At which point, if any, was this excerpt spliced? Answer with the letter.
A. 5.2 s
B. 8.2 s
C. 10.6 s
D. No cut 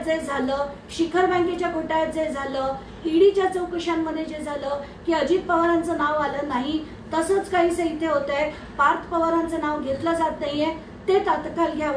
D